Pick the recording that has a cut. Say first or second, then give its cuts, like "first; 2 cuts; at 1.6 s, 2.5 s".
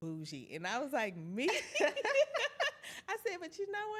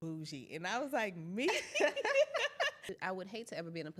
second; 1 cut; at 2.9 s